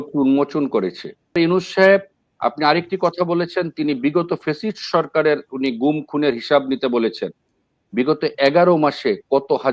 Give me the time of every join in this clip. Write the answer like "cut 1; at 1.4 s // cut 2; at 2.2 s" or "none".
cut 1; at 1.4 s